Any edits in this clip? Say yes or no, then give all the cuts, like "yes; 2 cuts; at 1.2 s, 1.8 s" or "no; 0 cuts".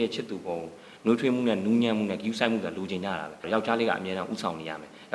yes; 1 cut; at 3.4 s